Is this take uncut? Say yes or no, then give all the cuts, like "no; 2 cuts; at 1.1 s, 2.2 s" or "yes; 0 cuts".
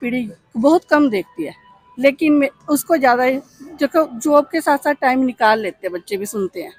yes; 0 cuts